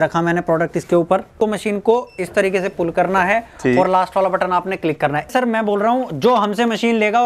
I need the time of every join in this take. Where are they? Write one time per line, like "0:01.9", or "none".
0:01.3
0:05.3